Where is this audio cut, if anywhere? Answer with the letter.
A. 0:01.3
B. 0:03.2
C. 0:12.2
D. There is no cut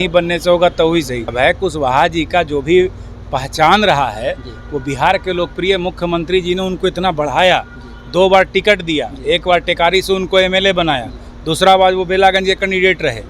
A